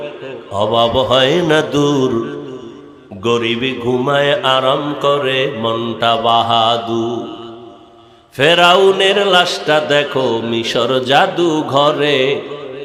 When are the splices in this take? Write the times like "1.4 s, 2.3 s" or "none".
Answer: none

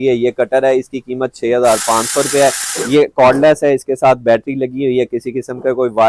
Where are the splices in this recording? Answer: none

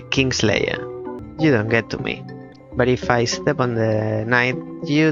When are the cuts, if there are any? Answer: 1.2 s

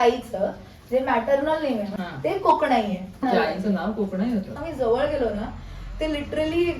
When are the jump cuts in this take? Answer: 1.9 s, 3.2 s, 4.6 s

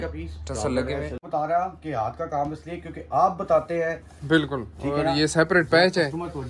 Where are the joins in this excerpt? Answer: 1.2 s

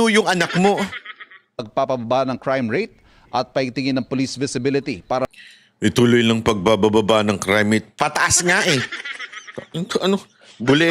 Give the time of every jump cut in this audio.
1.6 s

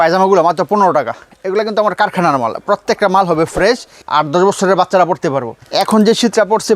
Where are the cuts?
1.3 s, 4.0 s, 5.6 s

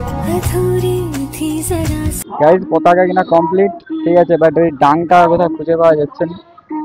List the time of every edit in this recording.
2.2 s

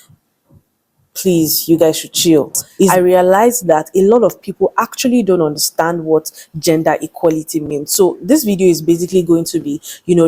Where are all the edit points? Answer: 2.7 s

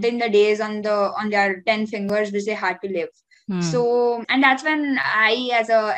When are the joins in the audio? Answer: 4.2 s

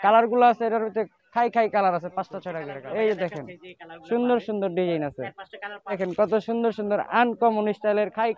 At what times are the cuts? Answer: 2.6 s, 6.0 s

